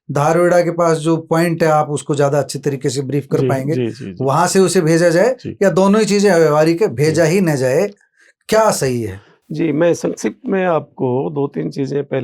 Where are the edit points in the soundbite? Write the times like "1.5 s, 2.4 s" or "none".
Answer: none